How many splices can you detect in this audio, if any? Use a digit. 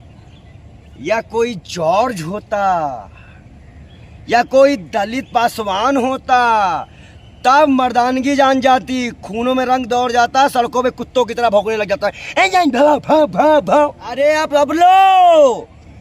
1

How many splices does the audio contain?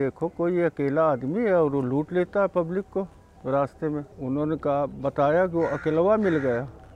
1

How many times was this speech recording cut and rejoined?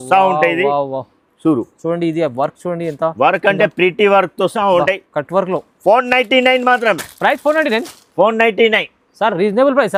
0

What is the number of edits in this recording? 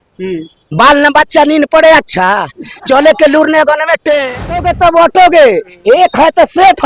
1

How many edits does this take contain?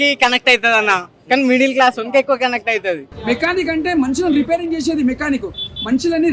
1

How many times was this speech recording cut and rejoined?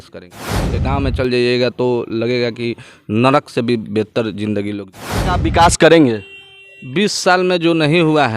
1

